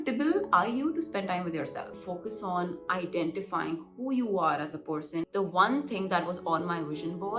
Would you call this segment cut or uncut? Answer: cut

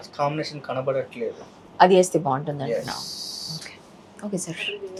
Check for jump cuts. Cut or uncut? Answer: uncut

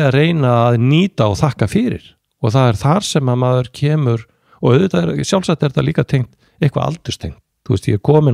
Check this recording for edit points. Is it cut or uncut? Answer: uncut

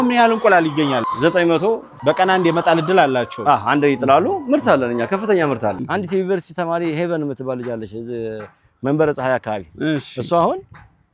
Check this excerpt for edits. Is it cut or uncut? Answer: cut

